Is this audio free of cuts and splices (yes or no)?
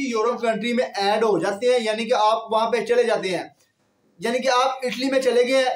yes